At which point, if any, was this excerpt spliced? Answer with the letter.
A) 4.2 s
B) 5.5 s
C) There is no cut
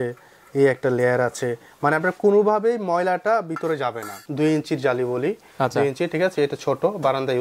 A